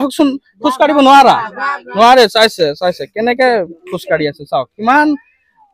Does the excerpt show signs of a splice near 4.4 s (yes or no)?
no